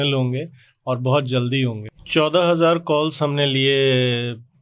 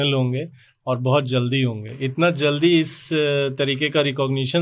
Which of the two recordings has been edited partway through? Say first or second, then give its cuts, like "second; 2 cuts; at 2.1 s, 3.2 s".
first; 1 cut; at 1.9 s